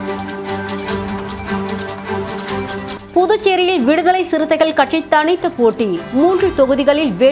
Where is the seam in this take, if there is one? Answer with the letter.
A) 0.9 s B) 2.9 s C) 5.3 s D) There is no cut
B